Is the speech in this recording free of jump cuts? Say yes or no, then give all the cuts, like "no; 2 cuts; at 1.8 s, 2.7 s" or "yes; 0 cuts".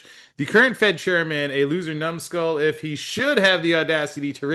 yes; 0 cuts